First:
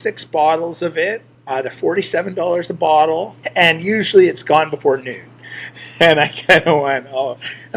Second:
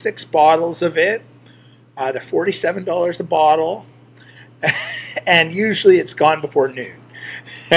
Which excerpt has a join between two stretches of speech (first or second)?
first